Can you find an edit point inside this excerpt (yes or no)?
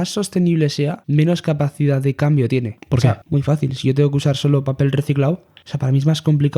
yes